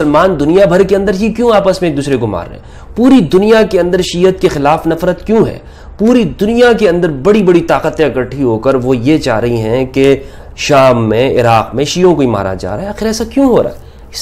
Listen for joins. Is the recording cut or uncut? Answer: uncut